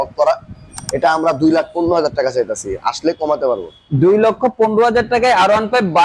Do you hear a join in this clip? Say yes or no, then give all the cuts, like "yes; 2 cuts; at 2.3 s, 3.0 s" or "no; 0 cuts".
no; 0 cuts